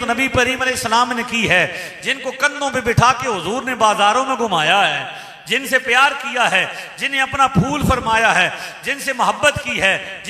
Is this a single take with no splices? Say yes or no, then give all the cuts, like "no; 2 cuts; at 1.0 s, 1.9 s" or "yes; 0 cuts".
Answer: yes; 0 cuts